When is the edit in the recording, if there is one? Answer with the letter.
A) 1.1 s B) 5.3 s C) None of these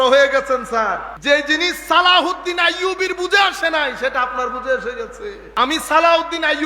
A